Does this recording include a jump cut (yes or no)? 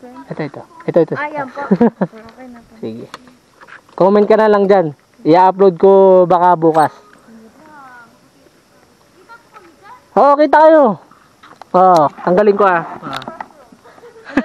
no